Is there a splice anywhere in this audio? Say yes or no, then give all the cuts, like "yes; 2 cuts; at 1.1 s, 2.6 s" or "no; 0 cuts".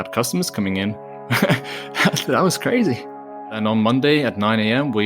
yes; 1 cut; at 3.5 s